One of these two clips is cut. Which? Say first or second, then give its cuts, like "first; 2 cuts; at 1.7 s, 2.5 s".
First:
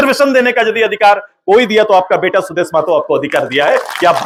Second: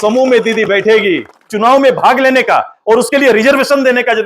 second; 1 cut; at 1.5 s